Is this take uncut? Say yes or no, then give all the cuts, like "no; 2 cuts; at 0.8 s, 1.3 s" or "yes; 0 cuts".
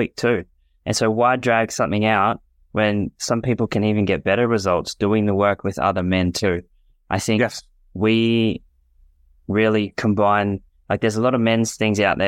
yes; 0 cuts